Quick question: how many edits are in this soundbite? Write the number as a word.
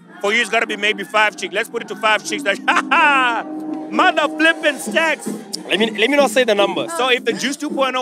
one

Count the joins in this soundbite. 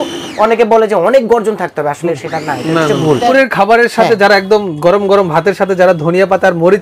one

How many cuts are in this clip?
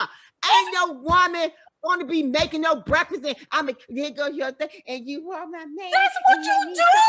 zero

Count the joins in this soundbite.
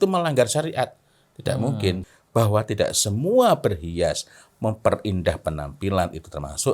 one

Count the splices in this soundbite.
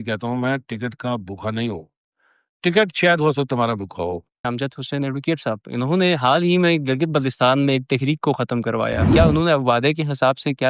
two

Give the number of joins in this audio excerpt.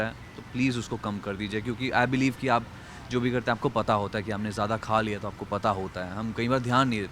zero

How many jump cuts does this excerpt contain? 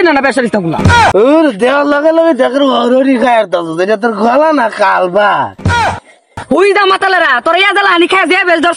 two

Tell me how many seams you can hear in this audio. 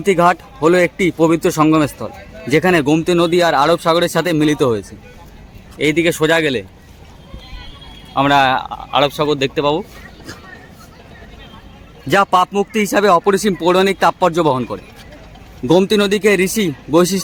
zero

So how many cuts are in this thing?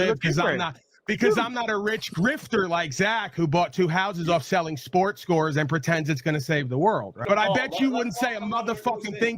one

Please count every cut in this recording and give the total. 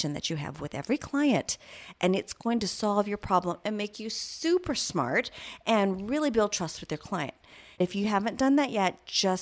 one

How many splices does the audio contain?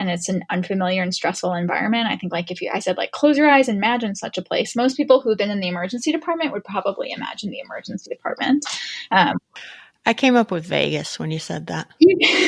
one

